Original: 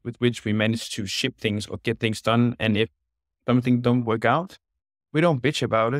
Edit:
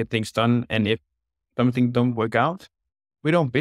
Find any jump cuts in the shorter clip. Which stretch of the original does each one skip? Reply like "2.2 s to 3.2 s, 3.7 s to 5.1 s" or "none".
none